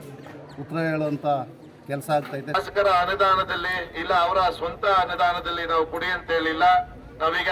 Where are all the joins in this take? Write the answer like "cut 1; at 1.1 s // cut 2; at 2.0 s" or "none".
cut 1; at 2.6 s